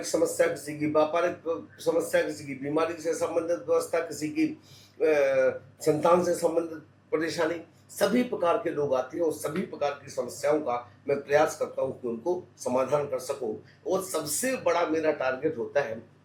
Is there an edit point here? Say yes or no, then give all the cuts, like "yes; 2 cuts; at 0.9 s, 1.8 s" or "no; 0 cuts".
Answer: no; 0 cuts